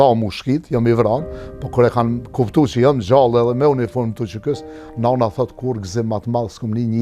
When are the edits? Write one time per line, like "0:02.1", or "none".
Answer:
none